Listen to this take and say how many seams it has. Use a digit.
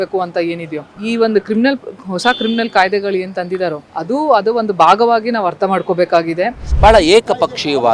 1